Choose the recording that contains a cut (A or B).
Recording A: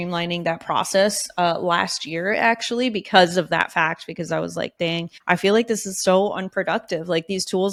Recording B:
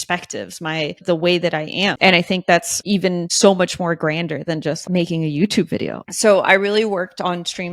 B